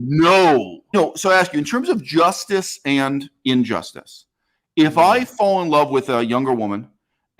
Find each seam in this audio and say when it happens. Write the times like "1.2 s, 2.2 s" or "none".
0.9 s